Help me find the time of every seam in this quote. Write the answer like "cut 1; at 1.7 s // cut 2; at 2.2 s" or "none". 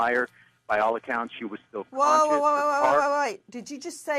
cut 1; at 1.2 s